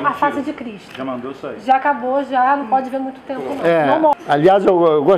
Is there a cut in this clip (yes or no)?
yes